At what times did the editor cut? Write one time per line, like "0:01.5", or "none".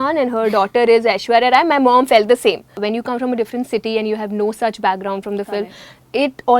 0:02.7

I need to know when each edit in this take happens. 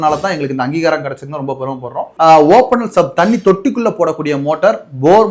0:02.1

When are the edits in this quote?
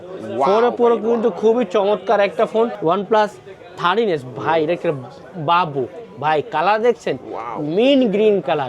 0:02.8

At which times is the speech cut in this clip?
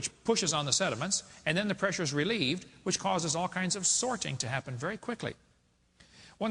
none

